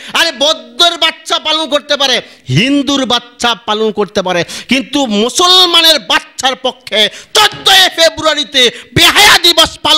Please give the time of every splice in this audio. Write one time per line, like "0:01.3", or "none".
none